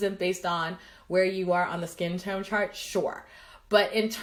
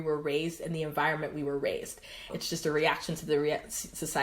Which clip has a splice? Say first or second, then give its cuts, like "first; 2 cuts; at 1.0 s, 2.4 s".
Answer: second; 1 cut; at 2.3 s